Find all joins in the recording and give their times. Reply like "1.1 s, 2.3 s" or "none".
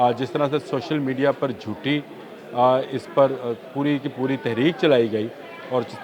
none

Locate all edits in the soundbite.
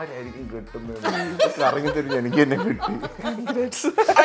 none

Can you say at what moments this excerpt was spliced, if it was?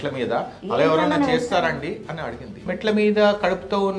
2.7 s

